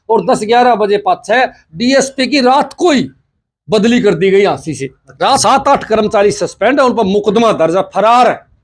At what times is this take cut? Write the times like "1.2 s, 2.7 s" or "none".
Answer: 5.4 s